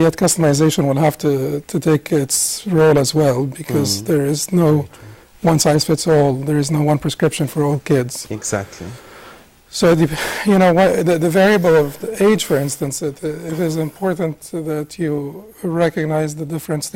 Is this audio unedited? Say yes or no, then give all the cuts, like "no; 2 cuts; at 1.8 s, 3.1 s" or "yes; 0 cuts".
yes; 0 cuts